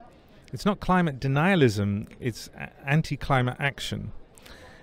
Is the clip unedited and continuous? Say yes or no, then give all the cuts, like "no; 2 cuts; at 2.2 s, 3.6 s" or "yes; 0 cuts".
no; 1 cut; at 2.1 s